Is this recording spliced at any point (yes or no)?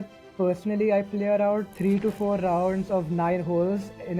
no